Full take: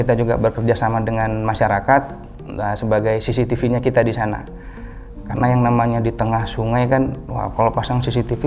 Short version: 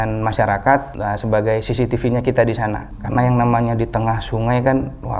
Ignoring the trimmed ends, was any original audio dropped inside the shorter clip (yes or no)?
yes